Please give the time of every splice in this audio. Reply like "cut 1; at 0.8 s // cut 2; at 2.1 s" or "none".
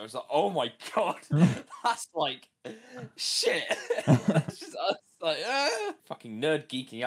cut 1; at 6.1 s